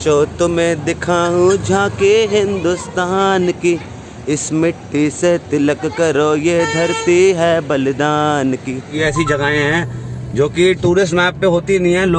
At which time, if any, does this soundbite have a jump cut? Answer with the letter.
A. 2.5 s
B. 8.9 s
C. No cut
B